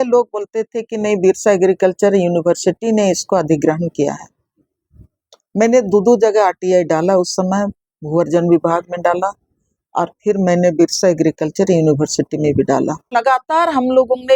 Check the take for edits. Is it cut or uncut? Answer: cut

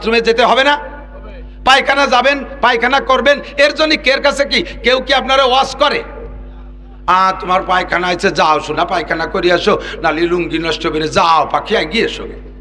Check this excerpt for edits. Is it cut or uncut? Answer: uncut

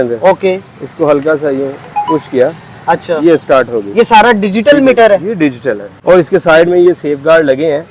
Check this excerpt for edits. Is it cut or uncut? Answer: cut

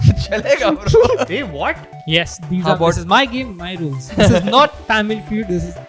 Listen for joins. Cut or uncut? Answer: cut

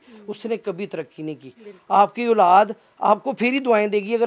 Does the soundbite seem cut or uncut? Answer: uncut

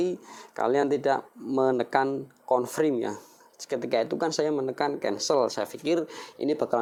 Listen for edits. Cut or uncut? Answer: uncut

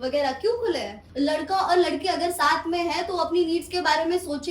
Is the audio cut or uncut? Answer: cut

